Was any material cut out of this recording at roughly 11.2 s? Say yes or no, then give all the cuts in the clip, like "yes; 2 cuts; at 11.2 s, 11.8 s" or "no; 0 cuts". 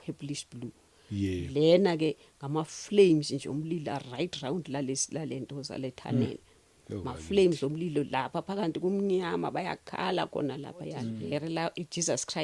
yes; 1 cut; at 11.2 s